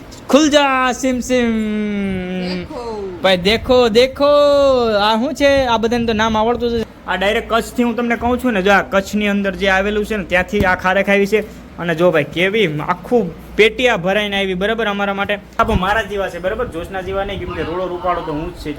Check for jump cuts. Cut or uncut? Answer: cut